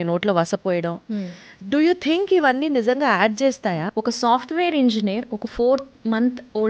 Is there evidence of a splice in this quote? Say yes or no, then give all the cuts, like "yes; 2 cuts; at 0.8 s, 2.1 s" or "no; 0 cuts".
yes; 2 cuts; at 1.4 s, 3.8 s